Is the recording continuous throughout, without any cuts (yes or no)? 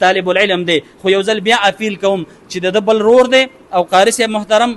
yes